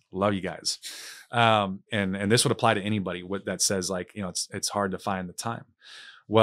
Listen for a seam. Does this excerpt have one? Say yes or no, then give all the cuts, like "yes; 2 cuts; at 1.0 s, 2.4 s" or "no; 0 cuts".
yes; 1 cut; at 1.9 s